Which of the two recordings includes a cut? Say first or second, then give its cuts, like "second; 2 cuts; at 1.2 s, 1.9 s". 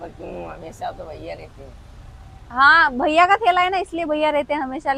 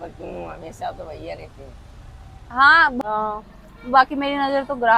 second; 1 cut; at 3.0 s